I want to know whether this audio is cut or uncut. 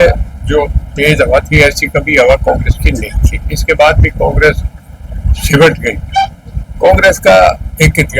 uncut